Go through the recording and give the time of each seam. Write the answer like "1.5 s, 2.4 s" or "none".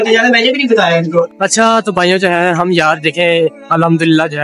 1.3 s